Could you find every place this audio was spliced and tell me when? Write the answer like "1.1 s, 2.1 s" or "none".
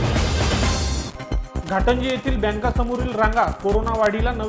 1.0 s